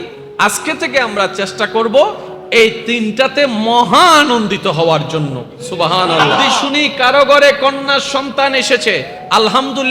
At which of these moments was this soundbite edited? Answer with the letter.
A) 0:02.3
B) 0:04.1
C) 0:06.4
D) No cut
C